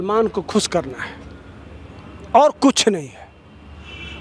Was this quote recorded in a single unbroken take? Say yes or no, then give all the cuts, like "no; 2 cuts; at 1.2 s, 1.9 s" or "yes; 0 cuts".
yes; 0 cuts